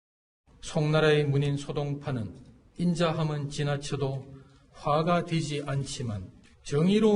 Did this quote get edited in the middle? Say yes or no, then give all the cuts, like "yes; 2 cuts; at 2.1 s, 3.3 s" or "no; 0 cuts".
yes; 1 cut; at 1.4 s